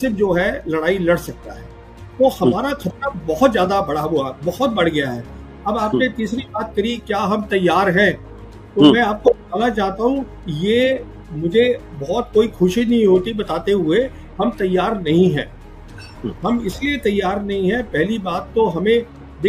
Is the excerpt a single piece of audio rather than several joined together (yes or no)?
yes